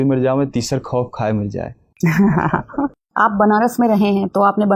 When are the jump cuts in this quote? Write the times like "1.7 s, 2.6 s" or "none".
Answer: none